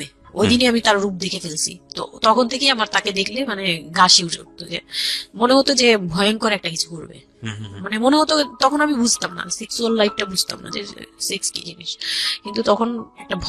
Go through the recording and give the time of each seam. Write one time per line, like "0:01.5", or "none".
none